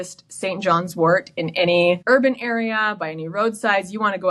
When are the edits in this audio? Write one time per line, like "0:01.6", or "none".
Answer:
0:02.0

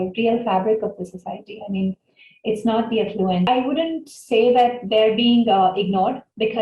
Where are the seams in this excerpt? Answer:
0:03.5

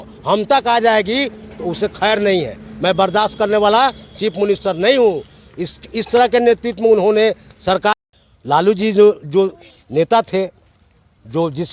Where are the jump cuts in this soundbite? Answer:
0:08.0

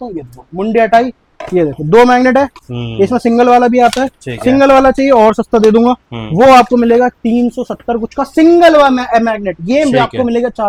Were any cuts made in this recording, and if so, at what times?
none

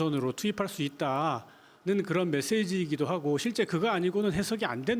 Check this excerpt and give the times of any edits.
none

